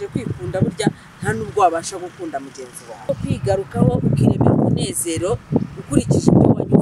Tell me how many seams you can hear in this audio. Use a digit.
1